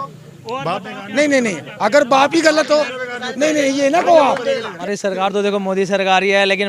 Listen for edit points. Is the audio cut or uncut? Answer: cut